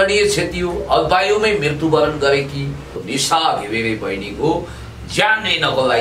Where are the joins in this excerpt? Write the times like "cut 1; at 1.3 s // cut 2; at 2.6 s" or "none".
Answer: cut 1; at 3.0 s